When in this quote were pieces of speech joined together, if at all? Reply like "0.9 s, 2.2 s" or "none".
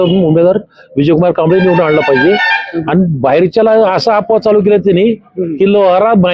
none